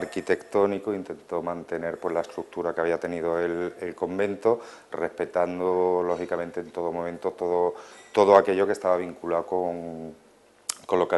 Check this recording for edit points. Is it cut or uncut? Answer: uncut